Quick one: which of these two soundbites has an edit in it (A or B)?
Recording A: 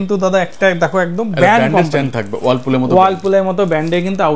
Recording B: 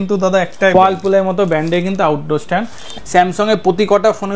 B